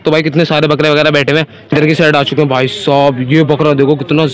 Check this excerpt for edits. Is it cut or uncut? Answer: cut